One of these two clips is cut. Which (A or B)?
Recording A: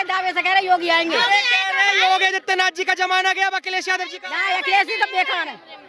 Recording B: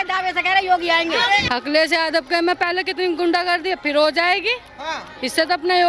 B